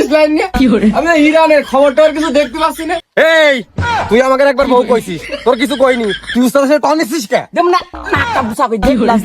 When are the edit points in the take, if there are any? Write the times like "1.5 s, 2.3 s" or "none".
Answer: 3.0 s